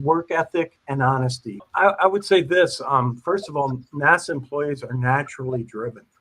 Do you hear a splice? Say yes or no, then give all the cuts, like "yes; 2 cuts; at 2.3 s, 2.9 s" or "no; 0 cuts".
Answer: yes; 1 cut; at 1.7 s